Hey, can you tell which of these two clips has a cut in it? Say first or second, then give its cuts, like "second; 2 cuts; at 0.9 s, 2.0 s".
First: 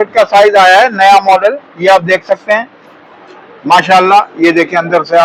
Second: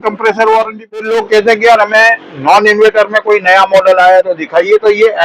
second; 1 cut; at 1.0 s